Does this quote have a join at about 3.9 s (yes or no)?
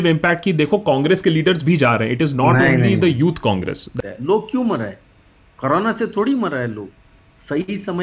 yes